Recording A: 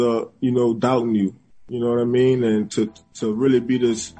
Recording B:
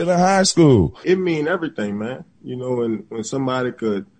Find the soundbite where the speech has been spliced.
B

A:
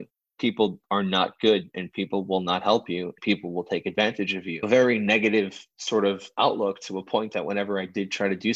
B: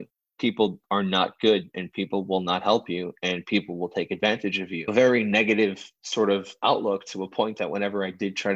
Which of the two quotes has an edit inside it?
A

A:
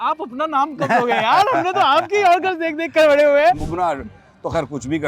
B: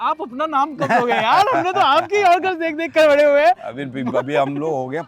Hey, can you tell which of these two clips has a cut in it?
A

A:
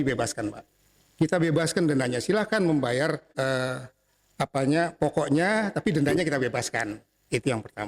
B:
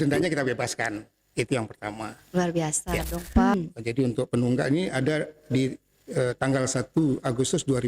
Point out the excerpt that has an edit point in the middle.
B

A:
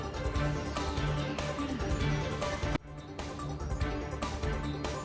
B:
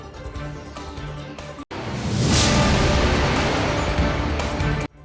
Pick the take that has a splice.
B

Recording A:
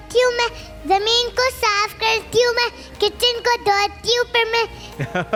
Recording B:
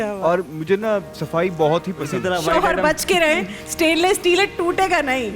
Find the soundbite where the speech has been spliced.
B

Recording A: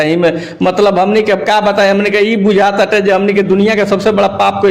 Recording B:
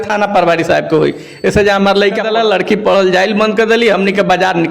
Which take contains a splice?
B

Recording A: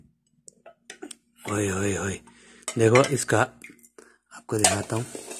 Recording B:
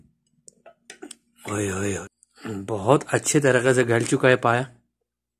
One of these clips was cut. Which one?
B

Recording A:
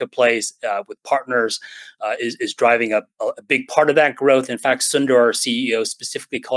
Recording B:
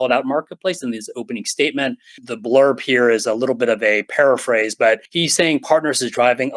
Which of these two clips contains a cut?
B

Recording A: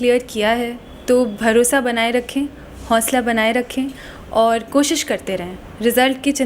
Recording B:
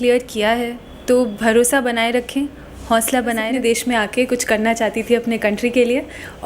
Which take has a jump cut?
B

